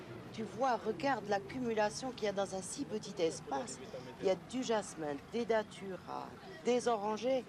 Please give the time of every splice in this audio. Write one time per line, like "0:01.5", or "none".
0:02.5